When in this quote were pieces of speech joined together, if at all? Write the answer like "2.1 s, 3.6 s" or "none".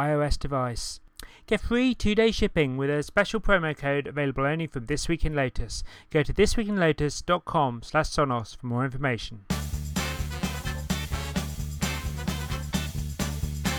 9.3 s